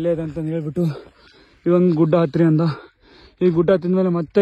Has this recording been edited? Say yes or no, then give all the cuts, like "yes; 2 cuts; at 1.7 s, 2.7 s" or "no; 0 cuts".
no; 0 cuts